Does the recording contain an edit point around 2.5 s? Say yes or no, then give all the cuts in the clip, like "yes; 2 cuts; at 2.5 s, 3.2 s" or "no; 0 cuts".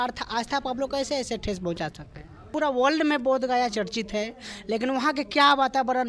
yes; 1 cut; at 2.5 s